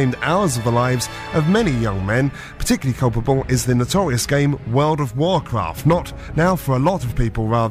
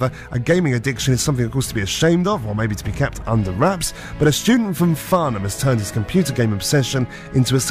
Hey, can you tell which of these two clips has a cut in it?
first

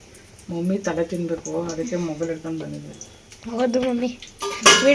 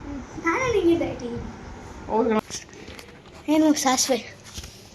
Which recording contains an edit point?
second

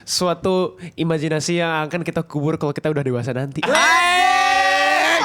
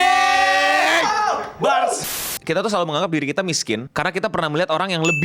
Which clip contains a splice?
second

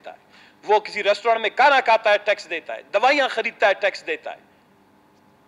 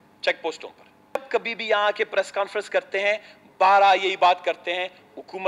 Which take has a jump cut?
second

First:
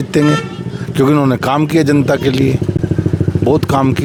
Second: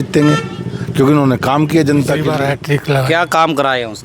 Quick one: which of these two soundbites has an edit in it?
second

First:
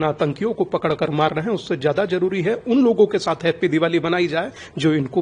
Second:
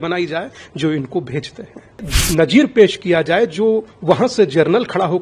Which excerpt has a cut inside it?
second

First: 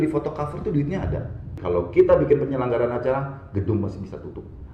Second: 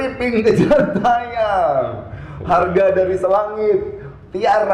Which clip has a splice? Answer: first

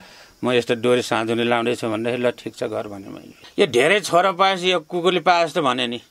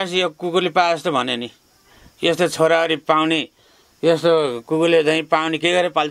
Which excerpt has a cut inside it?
first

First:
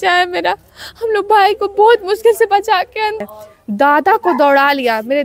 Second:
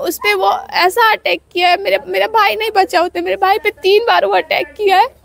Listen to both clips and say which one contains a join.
first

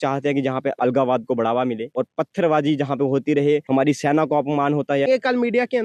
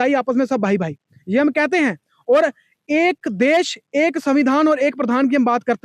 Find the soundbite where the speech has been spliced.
first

